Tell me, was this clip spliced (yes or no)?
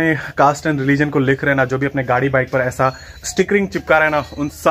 no